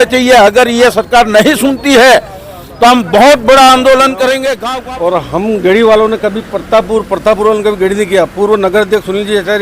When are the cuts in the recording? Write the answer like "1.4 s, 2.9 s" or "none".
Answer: 5.0 s